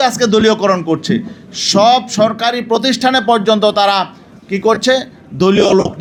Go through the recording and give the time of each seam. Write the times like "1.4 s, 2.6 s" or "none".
none